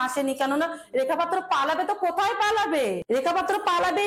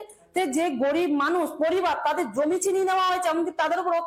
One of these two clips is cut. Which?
first; 1 cut; at 3.0 s

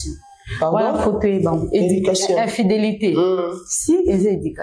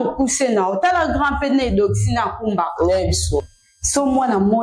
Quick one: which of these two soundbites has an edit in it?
second; 1 cut; at 3.5 s

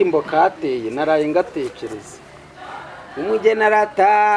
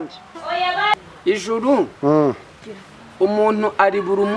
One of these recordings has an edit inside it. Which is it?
second; 1 cut; at 1.0 s

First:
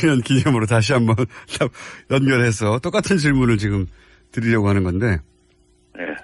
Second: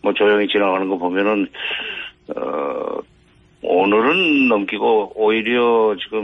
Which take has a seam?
first; 1 cut; at 4.3 s

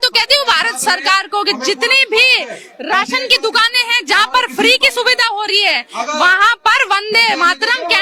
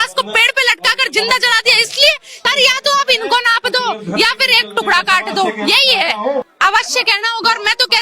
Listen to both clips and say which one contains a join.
second; 2 cuts; at 2.5 s, 6.5 s

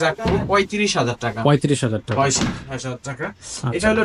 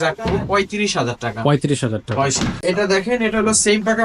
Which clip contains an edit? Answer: second; 1 cut; at 2.6 s

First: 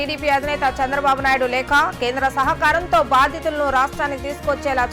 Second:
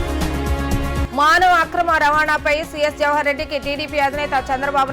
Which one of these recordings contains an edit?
second; 1 cut; at 1.1 s

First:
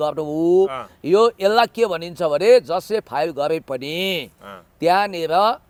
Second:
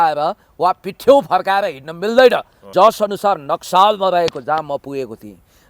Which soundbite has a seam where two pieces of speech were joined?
second; 1 cut; at 2.6 s

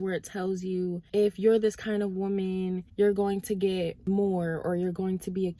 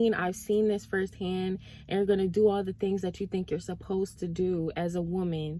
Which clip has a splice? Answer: first; 3 cuts; at 1.0 s, 2.8 s, 4.0 s

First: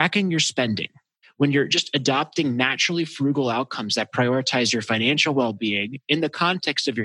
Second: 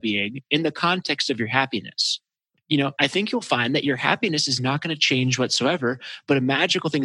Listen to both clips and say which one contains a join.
first; 1 cut; at 1.2 s

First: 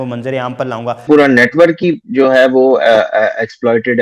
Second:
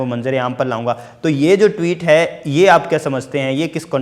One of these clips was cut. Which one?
first; 1 cut; at 1.1 s

